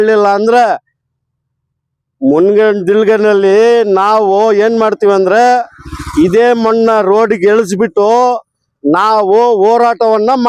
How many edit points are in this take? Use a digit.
0